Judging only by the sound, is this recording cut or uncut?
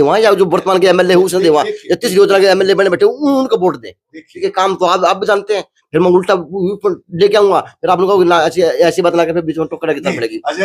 uncut